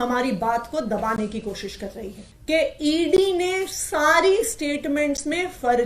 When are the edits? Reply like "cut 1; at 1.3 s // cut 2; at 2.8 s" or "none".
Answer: cut 1; at 2.2 s